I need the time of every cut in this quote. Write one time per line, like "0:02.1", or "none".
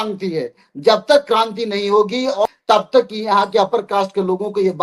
none